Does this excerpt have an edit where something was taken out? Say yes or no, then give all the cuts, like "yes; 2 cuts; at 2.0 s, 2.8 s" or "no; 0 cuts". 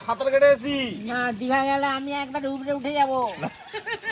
no; 0 cuts